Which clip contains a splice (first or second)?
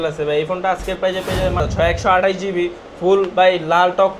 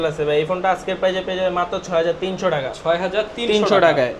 first